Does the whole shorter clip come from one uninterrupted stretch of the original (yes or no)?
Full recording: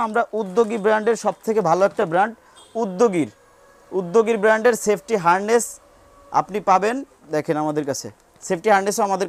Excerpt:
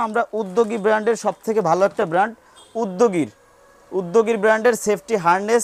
yes